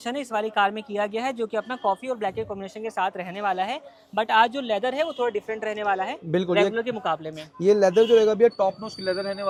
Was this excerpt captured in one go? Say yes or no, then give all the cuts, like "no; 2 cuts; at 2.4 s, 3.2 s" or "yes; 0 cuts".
yes; 0 cuts